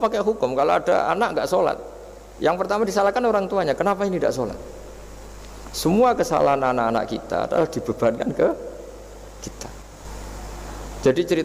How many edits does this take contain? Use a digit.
1